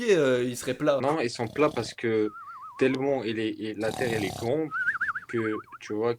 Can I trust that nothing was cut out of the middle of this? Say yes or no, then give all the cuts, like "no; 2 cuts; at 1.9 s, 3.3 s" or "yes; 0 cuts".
no; 1 cut; at 1.0 s